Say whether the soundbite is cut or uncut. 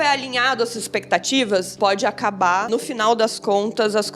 cut